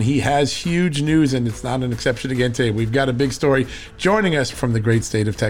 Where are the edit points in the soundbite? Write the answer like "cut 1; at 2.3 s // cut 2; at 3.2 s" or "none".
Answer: cut 1; at 4.5 s